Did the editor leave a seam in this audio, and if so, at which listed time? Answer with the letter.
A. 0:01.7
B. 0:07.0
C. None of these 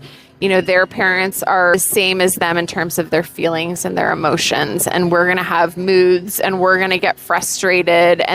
A